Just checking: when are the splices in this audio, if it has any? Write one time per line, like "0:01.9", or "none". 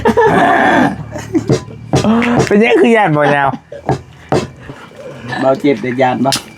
0:04.7